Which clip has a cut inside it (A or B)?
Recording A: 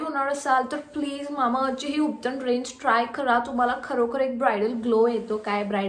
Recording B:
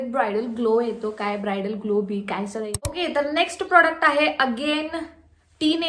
B